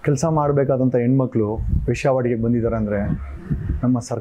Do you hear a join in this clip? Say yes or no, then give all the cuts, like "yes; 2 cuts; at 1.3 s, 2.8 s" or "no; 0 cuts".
no; 0 cuts